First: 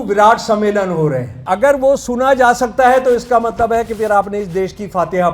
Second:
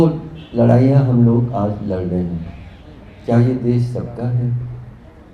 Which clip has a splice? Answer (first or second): first